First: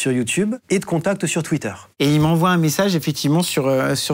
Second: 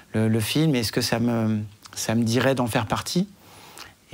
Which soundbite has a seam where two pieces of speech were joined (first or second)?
first